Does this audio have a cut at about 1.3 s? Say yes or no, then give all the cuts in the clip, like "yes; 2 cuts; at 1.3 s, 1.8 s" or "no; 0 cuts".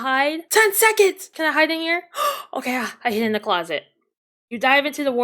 yes; 1 cut; at 1.3 s